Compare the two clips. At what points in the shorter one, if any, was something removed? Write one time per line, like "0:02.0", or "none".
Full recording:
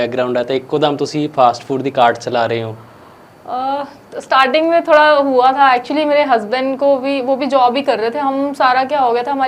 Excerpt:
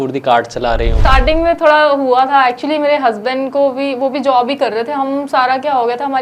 0:01.0